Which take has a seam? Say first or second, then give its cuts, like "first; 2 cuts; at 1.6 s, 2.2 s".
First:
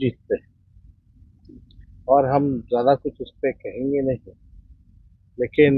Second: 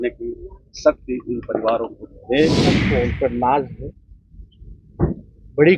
second; 1 cut; at 2.8 s